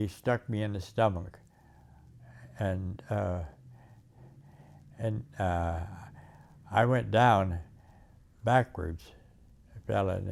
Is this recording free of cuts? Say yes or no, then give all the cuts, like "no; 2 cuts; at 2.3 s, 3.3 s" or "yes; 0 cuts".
yes; 0 cuts